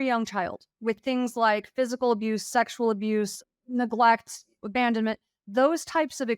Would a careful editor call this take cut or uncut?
cut